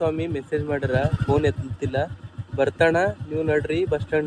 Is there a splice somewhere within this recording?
no; 0 cuts

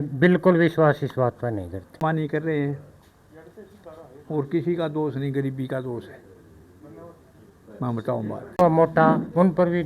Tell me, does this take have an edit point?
yes; 2 cuts; at 2.0 s, 8.6 s

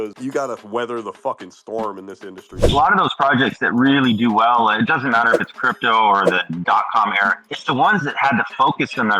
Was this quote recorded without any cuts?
no; 1 cut; at 2.6 s

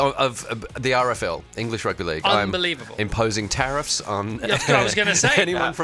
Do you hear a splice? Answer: no; 0 cuts

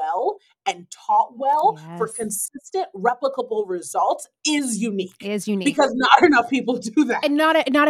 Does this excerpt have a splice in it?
no; 0 cuts

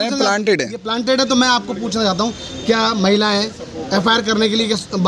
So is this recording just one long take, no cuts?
yes; 0 cuts

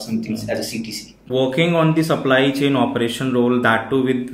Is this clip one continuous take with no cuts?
yes; 0 cuts

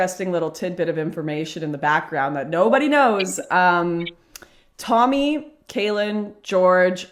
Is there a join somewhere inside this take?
no; 0 cuts

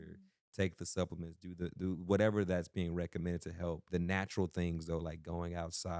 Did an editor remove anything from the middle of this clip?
yes; 1 cut; at 3.8 s

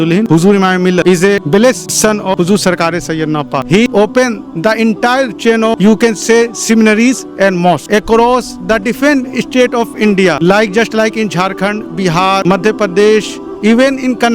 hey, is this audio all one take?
no; 1 cut; at 3.6 s

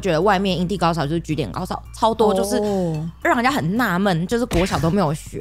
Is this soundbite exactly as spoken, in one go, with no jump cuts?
no; 1 cut; at 3.2 s

